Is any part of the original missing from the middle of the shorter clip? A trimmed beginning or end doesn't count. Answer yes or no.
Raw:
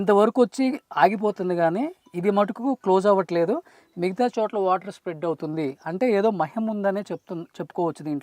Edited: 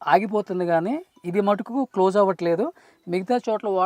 no